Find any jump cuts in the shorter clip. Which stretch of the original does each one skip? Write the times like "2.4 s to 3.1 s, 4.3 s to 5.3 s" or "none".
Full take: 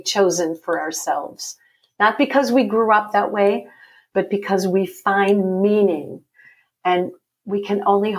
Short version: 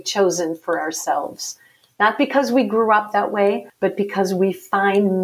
3.7 s to 4.0 s